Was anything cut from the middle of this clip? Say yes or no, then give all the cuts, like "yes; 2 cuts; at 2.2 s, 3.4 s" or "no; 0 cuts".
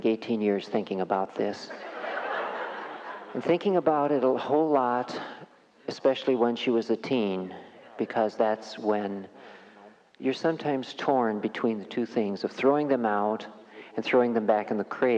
no; 0 cuts